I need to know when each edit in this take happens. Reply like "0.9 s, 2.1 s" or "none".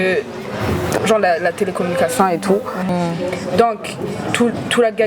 2.9 s